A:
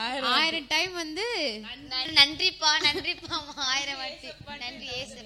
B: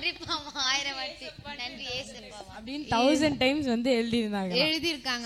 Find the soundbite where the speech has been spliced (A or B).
A